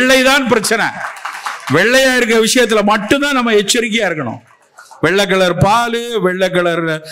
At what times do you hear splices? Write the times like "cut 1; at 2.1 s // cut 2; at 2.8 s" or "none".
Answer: none